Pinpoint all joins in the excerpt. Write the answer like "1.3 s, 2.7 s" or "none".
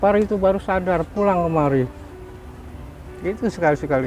none

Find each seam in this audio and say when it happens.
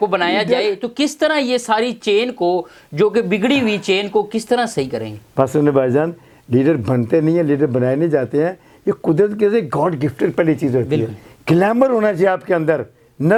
none

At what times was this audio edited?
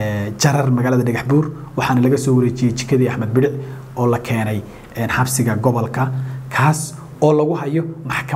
none

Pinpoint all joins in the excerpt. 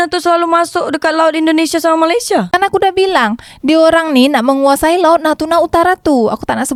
none

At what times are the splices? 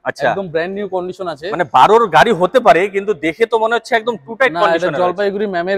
none

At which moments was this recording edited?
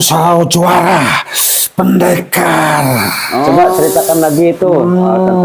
3.5 s

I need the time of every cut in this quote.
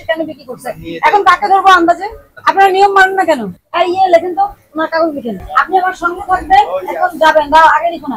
none

